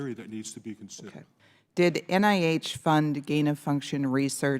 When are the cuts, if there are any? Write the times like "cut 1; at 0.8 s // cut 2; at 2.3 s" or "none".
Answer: cut 1; at 1.2 s